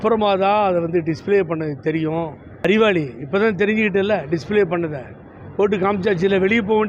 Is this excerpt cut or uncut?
cut